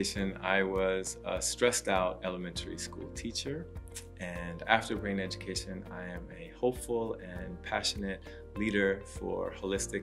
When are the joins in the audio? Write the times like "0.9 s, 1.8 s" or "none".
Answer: none